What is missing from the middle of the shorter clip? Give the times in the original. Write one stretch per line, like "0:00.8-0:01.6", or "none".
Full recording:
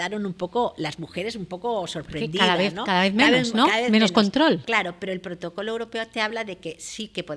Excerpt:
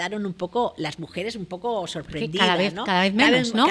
none

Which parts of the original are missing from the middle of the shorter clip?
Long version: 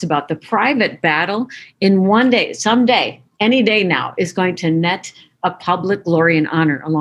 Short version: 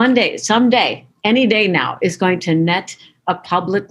none

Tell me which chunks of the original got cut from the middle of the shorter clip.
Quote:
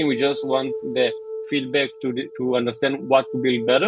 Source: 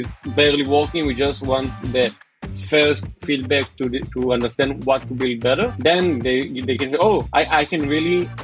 0:02.3-0:03.1

